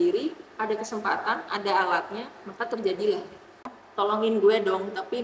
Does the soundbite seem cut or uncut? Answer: cut